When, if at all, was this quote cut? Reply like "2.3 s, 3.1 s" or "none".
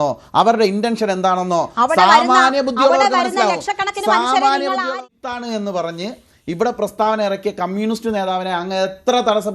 4.9 s